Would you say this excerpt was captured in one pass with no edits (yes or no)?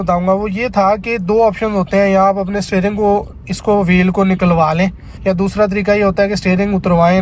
no